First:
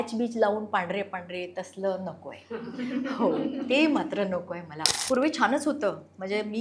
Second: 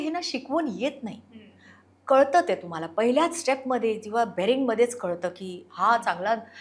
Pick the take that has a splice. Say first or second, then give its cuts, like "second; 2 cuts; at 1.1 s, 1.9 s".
first; 1 cut; at 4.9 s